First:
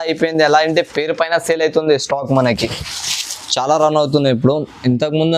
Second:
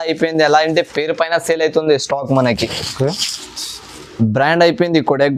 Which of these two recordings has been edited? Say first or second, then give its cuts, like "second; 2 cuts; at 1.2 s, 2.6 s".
first; 1 cut; at 2.6 s